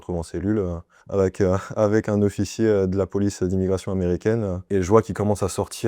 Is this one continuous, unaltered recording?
no; 1 cut; at 4.6 s

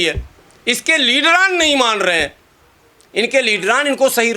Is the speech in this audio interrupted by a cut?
no; 0 cuts

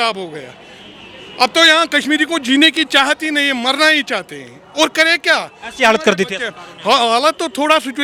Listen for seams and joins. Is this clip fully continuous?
yes; 0 cuts

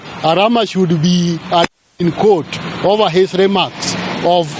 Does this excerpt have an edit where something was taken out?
no; 0 cuts

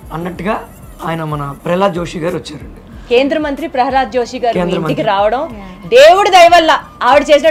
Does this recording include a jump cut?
no; 0 cuts

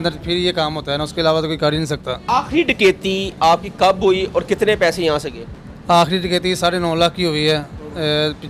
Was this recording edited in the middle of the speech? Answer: yes; 1 cut; at 2.2 s

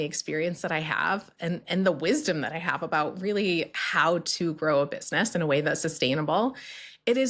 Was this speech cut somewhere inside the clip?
no; 0 cuts

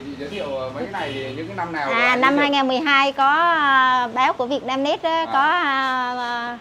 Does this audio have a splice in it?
no; 0 cuts

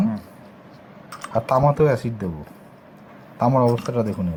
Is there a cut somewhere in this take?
no; 0 cuts

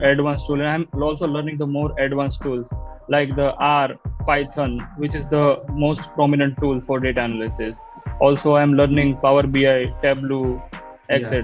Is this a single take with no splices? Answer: yes; 0 cuts

